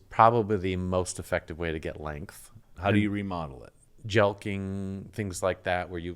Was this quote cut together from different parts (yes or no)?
yes